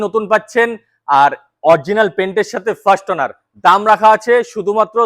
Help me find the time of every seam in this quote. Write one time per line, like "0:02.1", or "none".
none